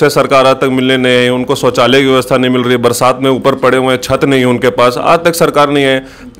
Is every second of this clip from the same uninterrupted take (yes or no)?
yes